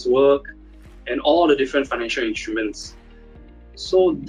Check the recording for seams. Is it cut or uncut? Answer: uncut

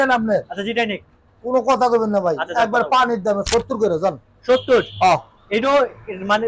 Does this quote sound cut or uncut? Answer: uncut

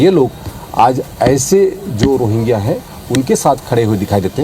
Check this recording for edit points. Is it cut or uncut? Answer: uncut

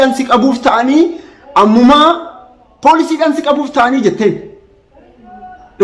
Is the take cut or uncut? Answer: uncut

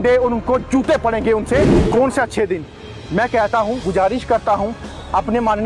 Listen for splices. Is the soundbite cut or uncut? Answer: cut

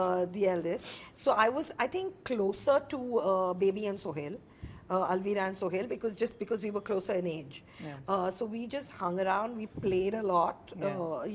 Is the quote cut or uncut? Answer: uncut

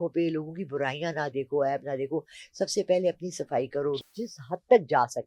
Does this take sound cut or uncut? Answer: cut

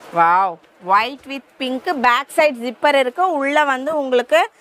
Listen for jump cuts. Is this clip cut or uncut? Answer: uncut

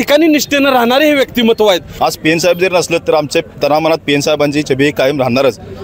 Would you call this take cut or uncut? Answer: cut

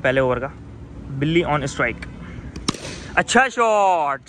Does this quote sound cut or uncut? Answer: uncut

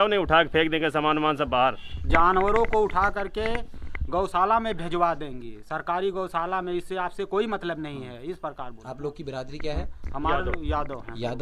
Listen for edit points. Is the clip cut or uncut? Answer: uncut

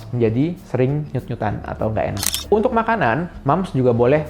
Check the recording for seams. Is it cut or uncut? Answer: cut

